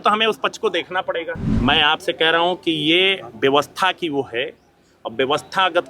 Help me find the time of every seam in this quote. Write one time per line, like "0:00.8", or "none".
0:01.5